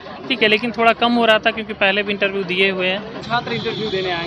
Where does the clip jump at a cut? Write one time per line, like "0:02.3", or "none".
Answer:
0:03.2